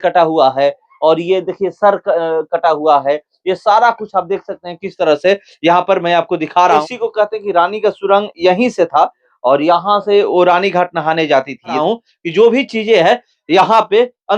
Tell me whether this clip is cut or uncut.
cut